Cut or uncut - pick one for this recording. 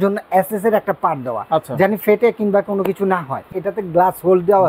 cut